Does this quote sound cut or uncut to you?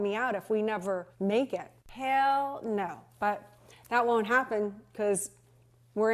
uncut